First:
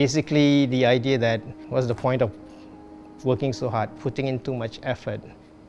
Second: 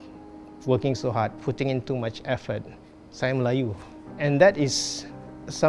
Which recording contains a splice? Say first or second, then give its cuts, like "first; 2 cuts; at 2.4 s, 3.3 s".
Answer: second; 1 cut; at 4.0 s